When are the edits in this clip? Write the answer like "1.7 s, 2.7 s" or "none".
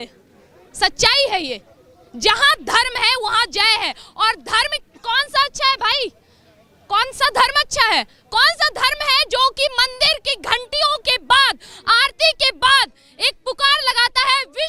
none